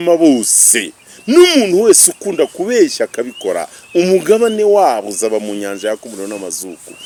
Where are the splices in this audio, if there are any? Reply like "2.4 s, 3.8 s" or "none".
none